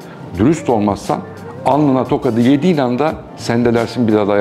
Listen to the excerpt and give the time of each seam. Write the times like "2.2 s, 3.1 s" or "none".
none